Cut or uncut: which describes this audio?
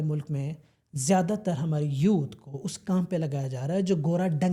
uncut